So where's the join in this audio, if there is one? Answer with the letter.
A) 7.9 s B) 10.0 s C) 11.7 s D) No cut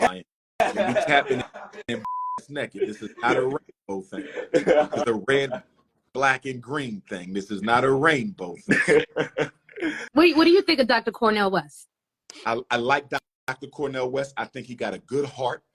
B